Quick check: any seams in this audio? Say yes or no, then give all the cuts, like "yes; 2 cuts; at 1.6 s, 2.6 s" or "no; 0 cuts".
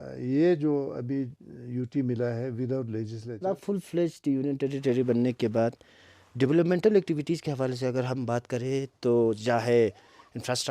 yes; 1 cut; at 3.4 s